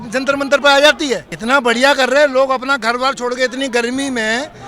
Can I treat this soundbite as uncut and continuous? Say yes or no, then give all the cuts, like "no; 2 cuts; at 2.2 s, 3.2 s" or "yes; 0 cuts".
no; 1 cut; at 1.3 s